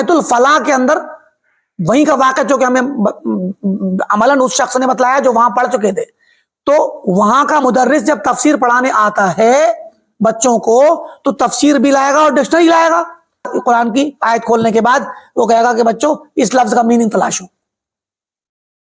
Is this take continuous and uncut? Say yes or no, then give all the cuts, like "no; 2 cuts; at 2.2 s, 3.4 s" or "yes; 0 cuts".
no; 1 cut; at 13.5 s